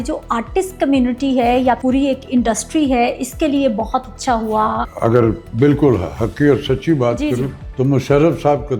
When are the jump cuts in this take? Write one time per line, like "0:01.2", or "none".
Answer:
0:01.8
0:04.9
0:07.6